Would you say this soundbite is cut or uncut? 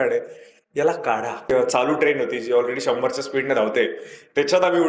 cut